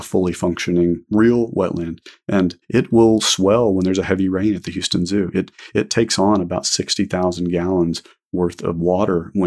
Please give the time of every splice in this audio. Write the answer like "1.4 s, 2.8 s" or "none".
1.0 s, 2.6 s